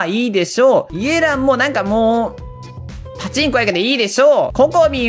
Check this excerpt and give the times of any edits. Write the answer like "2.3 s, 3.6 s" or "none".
none